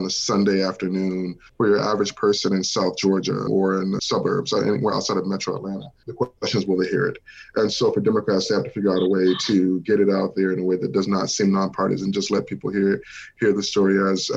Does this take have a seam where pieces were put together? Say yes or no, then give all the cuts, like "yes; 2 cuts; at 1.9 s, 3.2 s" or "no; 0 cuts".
yes; 3 cuts; at 1.4 s, 3.5 s, 6.0 s